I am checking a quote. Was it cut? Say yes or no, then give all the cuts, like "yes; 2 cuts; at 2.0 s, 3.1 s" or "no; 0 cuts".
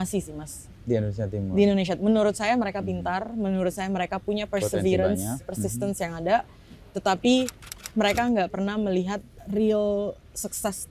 yes; 1 cut; at 9.3 s